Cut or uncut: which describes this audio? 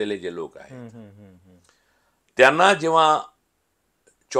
uncut